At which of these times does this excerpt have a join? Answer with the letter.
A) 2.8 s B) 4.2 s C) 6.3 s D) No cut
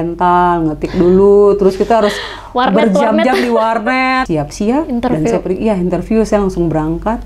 B